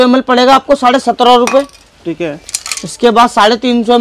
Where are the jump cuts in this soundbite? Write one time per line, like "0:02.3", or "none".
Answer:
none